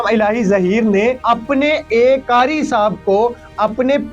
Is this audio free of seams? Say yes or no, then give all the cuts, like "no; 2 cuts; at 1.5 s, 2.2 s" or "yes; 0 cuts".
no; 2 cuts; at 1.2 s, 2.2 s